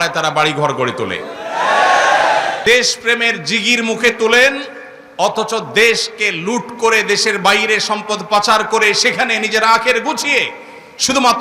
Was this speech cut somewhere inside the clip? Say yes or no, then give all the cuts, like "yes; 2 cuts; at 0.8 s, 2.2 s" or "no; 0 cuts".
yes; 1 cut; at 2.6 s